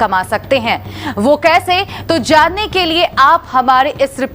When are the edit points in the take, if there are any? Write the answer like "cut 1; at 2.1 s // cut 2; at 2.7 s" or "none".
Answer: cut 1; at 0.9 s